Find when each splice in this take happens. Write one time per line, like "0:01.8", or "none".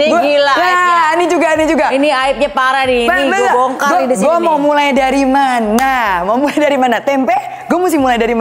none